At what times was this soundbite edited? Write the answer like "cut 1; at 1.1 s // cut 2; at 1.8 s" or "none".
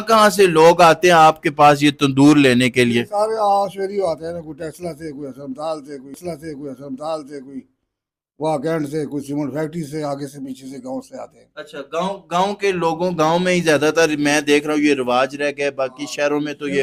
none